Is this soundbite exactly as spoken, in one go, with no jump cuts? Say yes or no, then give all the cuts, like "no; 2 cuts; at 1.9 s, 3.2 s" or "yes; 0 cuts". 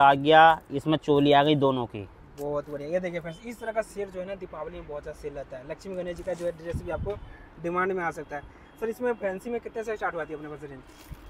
yes; 0 cuts